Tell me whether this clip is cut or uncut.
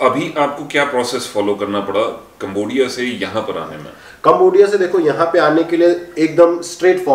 uncut